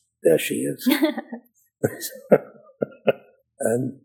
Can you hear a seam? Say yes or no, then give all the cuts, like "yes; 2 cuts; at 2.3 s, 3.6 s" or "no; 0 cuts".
no; 0 cuts